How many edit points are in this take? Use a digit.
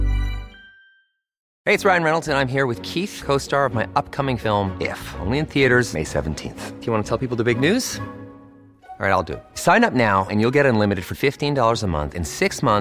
1